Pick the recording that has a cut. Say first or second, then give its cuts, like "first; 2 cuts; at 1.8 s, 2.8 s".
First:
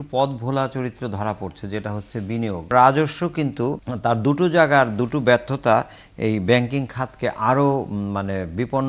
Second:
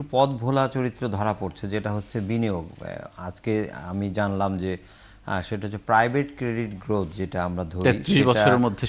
first; 2 cuts; at 2.7 s, 3.9 s